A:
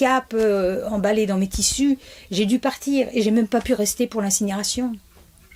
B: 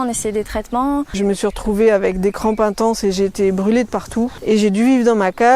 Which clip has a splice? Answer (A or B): B